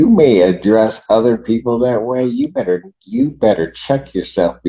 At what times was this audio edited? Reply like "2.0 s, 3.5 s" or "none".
none